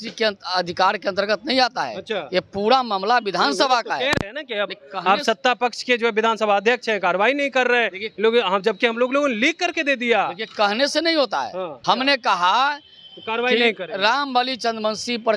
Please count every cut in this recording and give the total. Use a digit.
1